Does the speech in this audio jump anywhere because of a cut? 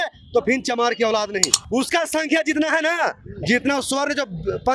yes; 1 cut; at 1.5 s

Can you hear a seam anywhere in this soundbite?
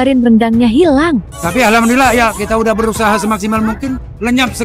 yes; 1 cut; at 1.2 s

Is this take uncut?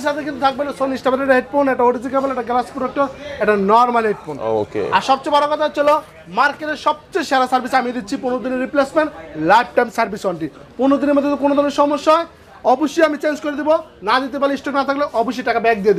yes; 0 cuts

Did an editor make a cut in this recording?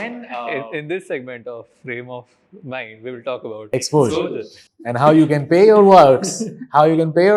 no; 0 cuts

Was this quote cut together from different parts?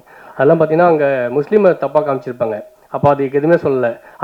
no; 0 cuts

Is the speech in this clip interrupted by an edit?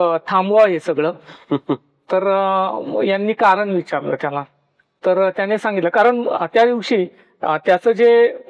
no; 0 cuts

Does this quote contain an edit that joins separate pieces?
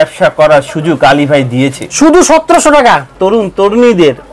yes; 1 cut; at 3.1 s

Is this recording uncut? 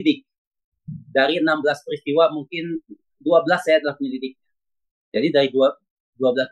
yes; 0 cuts

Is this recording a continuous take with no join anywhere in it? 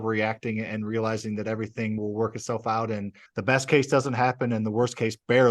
no; 2 cuts; at 2.0 s, 3.2 s

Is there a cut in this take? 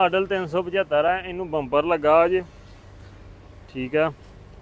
no; 0 cuts

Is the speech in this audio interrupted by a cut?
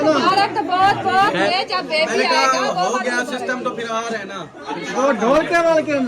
yes; 1 cut; at 1.5 s

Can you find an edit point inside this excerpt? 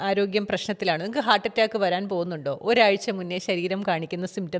no; 0 cuts

